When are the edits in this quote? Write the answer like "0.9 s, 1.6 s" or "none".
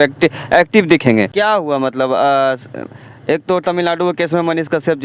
1.3 s